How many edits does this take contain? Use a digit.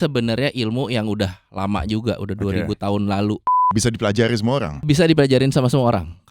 2